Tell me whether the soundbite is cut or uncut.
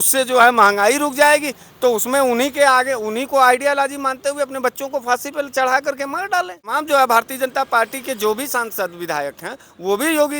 cut